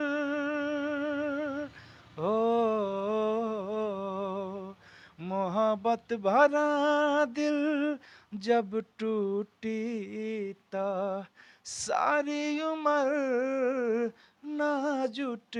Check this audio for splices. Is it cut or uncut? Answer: uncut